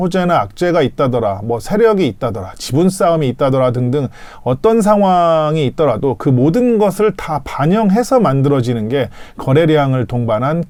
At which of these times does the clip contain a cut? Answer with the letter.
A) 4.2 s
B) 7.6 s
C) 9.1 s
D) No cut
D